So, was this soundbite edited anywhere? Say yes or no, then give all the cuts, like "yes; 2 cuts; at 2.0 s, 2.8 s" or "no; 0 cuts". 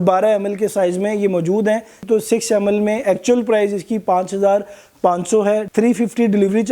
yes; 1 cut; at 2.0 s